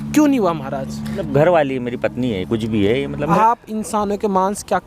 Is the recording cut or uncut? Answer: cut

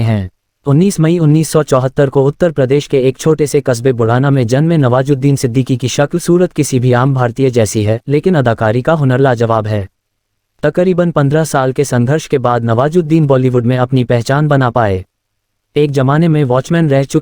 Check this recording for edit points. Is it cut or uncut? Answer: uncut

